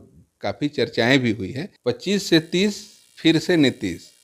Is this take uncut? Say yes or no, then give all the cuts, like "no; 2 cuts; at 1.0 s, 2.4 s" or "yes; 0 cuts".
no; 1 cut; at 1.6 s